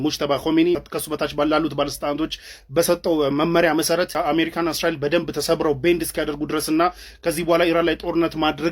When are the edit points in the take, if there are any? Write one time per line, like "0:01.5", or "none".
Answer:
0:00.9
0:04.1